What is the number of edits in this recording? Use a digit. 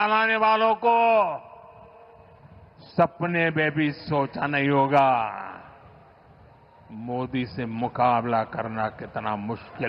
0